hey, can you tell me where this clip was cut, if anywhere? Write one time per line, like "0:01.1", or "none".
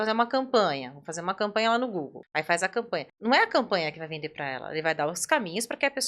0:02.2
0:03.1